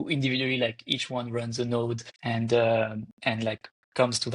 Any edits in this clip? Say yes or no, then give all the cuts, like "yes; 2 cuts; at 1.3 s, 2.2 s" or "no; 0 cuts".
yes; 1 cut; at 2.1 s